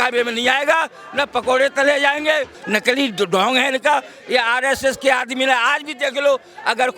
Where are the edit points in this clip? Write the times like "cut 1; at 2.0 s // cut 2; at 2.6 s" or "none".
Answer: cut 1; at 2.6 s